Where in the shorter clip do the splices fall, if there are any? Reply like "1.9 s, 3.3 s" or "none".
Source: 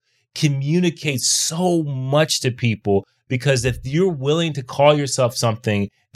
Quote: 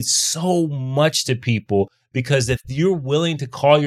none